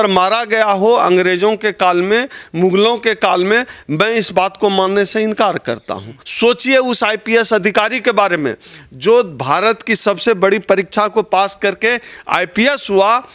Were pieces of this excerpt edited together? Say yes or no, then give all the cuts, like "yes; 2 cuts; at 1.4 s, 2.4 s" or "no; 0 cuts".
yes; 1 cut; at 6.2 s